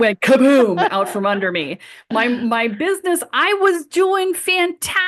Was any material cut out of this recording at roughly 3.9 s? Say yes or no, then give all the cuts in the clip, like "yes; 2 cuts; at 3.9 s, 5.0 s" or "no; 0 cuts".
no; 0 cuts